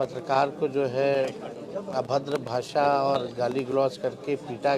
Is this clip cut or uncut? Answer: uncut